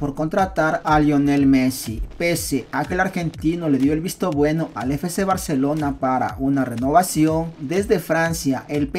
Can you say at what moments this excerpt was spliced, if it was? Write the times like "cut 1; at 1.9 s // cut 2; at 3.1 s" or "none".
none